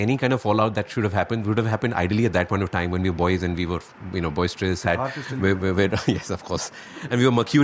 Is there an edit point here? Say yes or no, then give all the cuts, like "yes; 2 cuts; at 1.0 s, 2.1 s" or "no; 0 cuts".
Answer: no; 0 cuts